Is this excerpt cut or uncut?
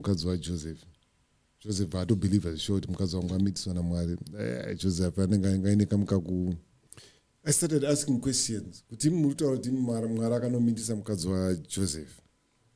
cut